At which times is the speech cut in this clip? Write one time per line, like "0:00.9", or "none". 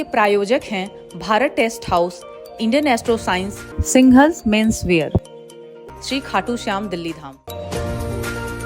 0:07.4